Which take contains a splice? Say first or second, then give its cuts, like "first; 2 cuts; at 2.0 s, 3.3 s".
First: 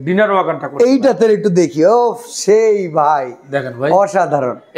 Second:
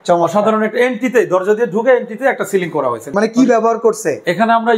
second; 1 cut; at 3.1 s